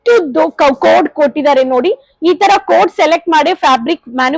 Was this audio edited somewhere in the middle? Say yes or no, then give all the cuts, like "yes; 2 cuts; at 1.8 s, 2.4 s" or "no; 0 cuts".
no; 0 cuts